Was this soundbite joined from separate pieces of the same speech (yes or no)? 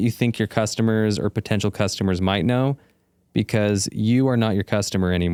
no